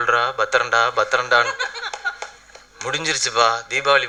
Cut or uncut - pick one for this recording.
uncut